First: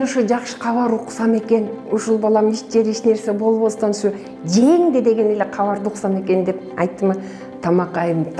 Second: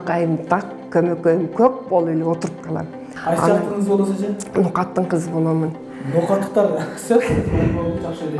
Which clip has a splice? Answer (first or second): second